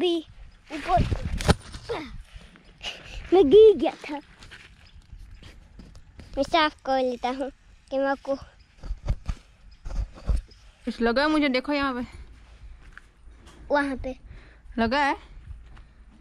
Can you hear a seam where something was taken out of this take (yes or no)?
yes